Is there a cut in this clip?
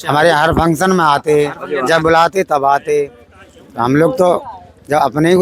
no; 0 cuts

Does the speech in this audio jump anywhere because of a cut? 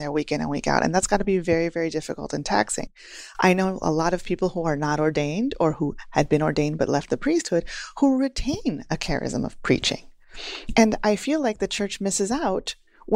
no; 0 cuts

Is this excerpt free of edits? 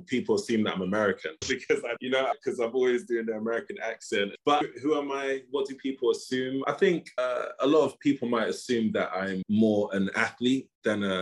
no; 4 cuts; at 2.0 s, 4.3 s, 6.6 s, 9.4 s

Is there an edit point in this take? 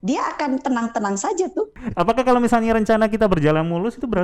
yes; 1 cut; at 1.8 s

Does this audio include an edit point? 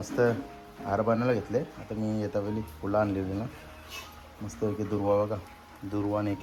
no; 0 cuts

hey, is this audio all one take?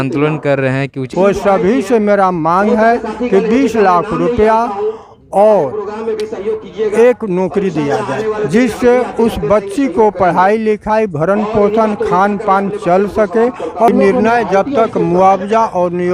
no; 2 cuts; at 1.0 s, 13.9 s

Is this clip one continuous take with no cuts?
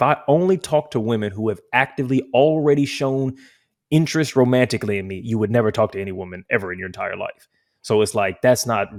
yes; 0 cuts

